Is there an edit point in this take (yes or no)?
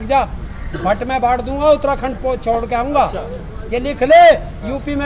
no